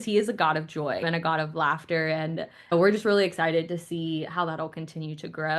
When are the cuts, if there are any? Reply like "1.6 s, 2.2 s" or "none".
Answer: 1.0 s, 2.7 s